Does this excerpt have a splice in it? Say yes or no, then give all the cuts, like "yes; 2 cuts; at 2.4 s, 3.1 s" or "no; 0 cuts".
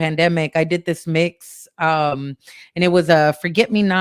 no; 0 cuts